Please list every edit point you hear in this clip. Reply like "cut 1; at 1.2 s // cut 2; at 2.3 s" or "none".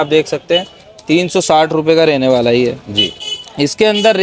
none

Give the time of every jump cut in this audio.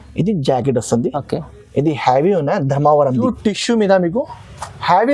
cut 1; at 3.2 s

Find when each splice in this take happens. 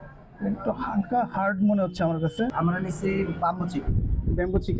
cut 1; at 2.5 s

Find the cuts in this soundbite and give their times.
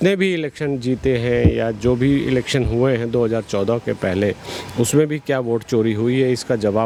none

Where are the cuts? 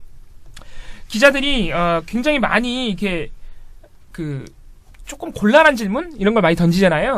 cut 1; at 1.3 s

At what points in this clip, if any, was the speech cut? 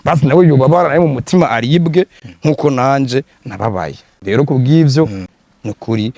cut 1; at 5.2 s

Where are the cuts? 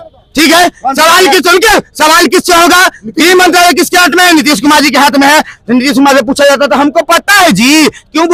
none

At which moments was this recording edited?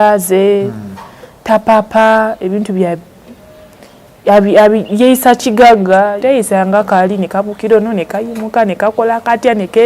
cut 1; at 6.1 s

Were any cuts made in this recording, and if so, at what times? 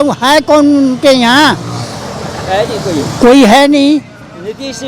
none

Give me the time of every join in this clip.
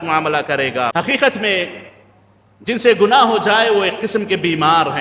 cut 1; at 0.9 s

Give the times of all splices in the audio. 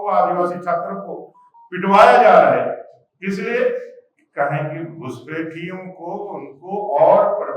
none

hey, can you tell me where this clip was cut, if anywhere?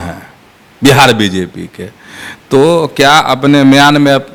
none

